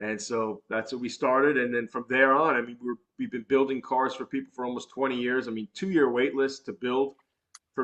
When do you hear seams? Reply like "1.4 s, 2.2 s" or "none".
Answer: none

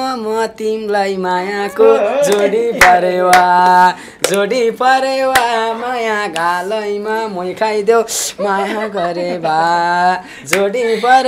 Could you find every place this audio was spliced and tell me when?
none

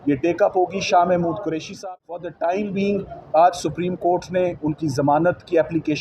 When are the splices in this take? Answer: 1.7 s

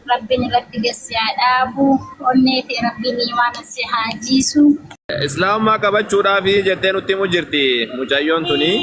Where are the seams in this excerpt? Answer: 5.1 s

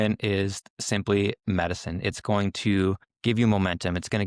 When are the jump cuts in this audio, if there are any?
3.1 s

